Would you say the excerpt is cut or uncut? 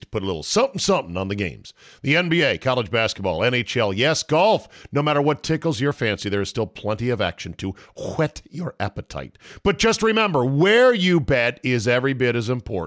uncut